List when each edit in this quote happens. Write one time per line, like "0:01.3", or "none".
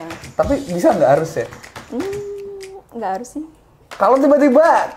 none